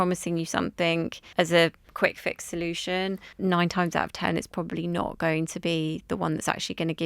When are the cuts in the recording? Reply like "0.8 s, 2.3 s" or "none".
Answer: 1.2 s, 1.8 s, 3.3 s